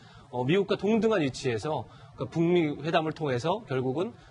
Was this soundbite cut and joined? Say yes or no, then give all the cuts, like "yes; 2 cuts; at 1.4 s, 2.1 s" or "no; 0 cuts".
no; 0 cuts